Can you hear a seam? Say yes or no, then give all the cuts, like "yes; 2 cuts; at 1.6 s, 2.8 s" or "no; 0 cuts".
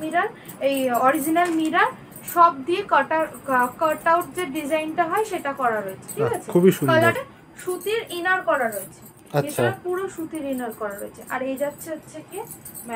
yes; 1 cut; at 7.2 s